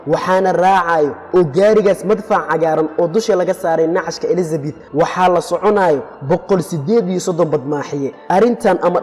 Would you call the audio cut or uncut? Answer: uncut